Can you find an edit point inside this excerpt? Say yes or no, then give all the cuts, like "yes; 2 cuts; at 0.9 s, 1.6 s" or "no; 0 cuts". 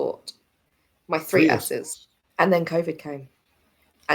yes; 1 cut; at 2.2 s